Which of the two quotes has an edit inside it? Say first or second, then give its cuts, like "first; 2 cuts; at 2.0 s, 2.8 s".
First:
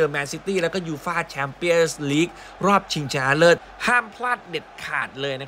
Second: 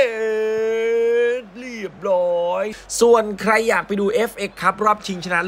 second; 1 cut; at 2.7 s